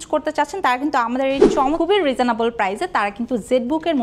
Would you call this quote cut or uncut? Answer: cut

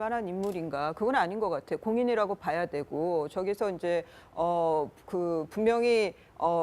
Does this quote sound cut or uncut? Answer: cut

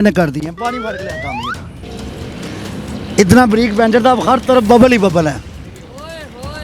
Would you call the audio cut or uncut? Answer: cut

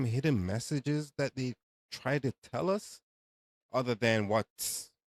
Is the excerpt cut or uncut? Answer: uncut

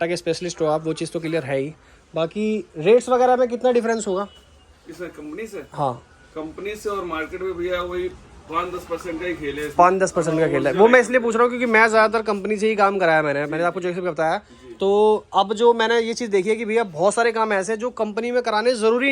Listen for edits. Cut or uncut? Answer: uncut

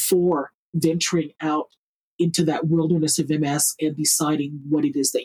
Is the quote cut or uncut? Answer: cut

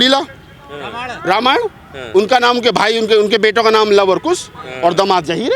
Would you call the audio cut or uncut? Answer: uncut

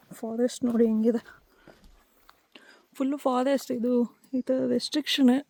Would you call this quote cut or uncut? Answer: uncut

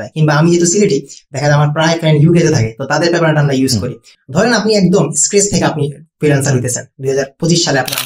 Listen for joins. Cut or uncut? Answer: cut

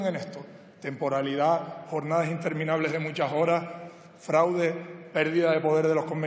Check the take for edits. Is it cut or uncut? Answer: cut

